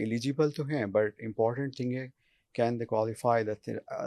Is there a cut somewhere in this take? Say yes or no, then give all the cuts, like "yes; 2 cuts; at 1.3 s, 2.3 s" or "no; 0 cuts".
no; 0 cuts